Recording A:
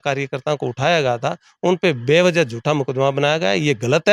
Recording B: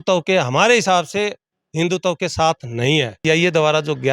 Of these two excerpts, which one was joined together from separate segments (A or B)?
B